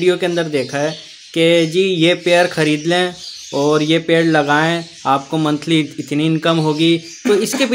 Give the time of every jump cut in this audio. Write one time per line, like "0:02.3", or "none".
none